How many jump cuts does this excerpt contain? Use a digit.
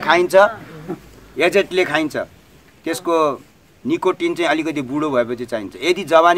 0